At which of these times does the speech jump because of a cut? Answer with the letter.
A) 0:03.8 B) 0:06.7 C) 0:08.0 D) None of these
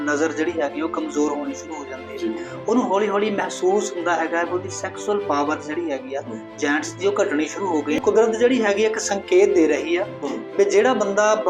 C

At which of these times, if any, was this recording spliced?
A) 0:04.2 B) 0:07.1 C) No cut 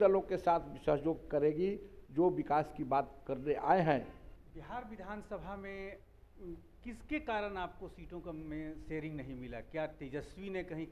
A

